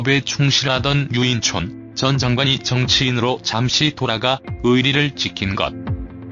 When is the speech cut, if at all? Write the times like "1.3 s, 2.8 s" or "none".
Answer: none

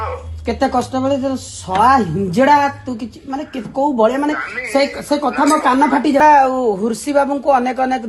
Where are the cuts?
6.2 s

